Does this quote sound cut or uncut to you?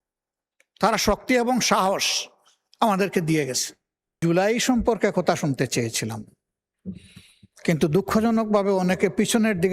cut